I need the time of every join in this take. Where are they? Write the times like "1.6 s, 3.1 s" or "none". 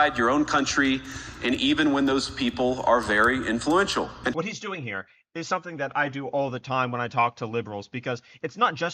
4.1 s